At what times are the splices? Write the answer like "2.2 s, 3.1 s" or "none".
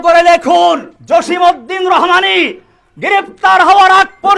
0.9 s